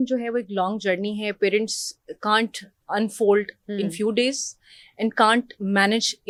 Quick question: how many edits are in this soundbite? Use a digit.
0